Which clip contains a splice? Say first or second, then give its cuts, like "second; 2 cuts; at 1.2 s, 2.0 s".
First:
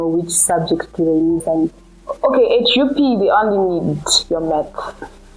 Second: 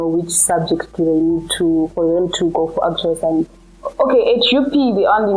first; 1 cut; at 1.4 s